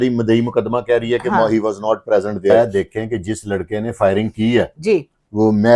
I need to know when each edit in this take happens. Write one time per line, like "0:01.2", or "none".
0:02.5